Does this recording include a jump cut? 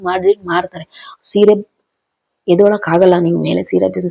yes; 1 cut; at 1.1 s

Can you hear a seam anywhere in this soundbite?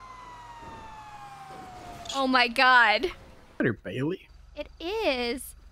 yes; 1 cut; at 3.6 s

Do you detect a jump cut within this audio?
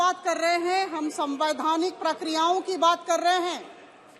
no; 0 cuts

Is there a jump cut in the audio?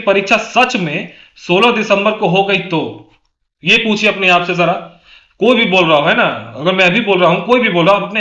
no; 0 cuts

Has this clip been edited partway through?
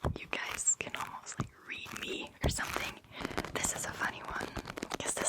yes; 1 cut; at 3.2 s

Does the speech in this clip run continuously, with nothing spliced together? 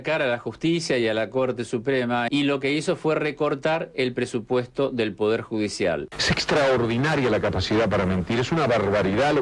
no; 2 cuts; at 2.2 s, 6.1 s

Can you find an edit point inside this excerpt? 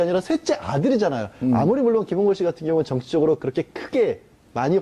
no; 0 cuts

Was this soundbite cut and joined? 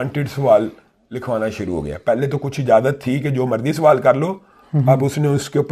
no; 0 cuts

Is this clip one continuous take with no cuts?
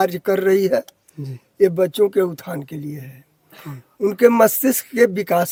yes; 0 cuts

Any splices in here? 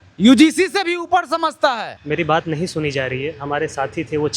yes; 1 cut; at 1.9 s

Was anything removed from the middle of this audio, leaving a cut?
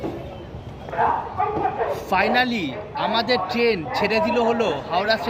no; 0 cuts

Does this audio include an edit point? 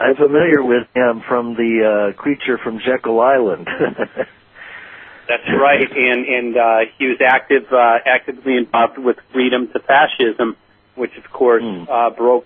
yes; 1 cut; at 9.3 s

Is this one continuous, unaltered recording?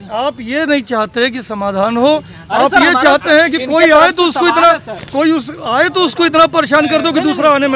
yes; 0 cuts

